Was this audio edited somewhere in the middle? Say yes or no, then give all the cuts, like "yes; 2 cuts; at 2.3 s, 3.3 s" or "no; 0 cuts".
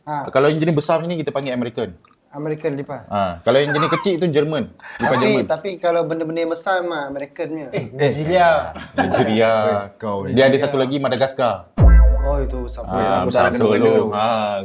no; 0 cuts